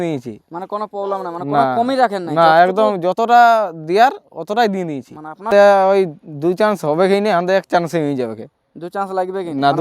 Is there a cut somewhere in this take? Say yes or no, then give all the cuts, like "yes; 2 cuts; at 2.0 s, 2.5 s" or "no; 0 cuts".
yes; 1 cut; at 5.5 s